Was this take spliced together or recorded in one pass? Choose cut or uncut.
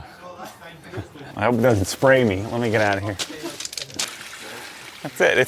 cut